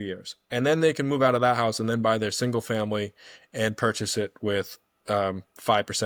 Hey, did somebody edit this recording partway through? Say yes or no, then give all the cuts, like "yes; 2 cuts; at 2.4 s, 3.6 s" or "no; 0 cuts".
no; 0 cuts